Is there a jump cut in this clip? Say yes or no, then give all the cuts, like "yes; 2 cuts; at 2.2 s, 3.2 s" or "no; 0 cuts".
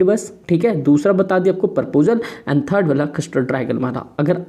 no; 0 cuts